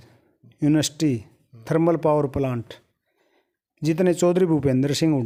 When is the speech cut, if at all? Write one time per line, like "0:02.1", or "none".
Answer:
none